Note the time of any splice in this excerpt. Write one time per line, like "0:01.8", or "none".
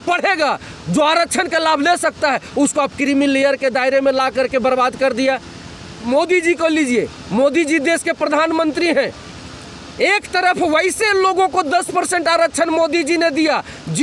0:06.0